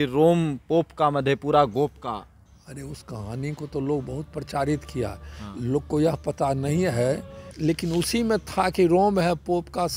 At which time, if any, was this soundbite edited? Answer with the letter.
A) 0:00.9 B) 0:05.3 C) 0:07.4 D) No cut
C